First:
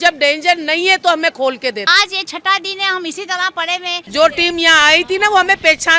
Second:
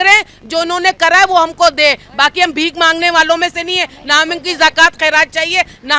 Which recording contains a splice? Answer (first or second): first